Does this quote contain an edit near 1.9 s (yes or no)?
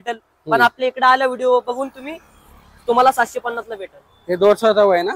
no